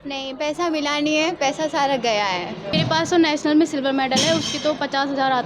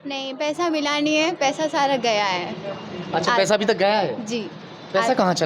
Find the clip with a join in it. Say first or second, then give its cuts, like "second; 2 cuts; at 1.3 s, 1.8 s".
first; 1 cut; at 2.7 s